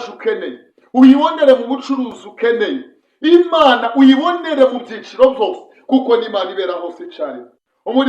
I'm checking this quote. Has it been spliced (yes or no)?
yes